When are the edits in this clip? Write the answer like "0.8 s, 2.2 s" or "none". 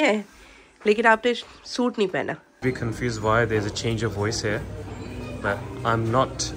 2.6 s